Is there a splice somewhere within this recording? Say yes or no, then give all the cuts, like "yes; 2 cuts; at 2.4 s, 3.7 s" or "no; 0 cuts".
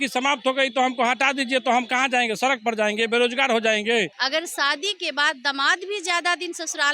yes; 1 cut; at 4.2 s